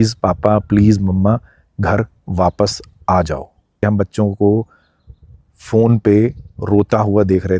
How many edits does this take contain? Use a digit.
1